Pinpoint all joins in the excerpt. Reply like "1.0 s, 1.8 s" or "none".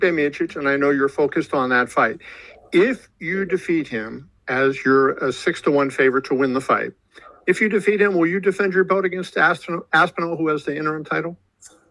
none